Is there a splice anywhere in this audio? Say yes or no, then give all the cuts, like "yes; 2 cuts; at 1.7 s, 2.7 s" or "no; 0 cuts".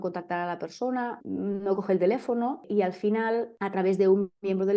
yes; 3 cuts; at 1.2 s, 2.7 s, 3.5 s